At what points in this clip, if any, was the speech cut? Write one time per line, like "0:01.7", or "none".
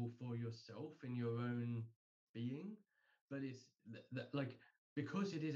none